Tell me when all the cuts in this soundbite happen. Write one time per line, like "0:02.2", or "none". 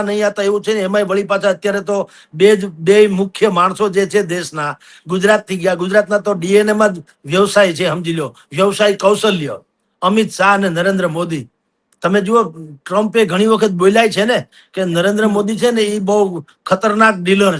none